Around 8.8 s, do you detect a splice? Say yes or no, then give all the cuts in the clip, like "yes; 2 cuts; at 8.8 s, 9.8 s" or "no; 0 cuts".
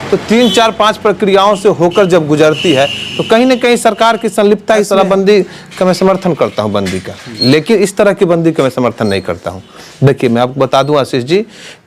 no; 1 cut; at 4.9 s